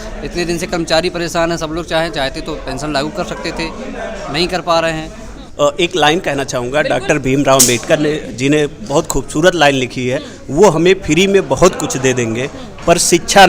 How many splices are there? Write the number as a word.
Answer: one